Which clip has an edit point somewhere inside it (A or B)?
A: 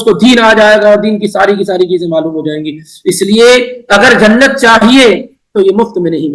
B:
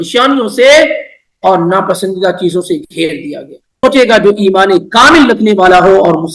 B